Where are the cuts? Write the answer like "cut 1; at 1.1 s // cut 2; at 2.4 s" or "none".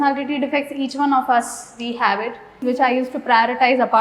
cut 1; at 2.6 s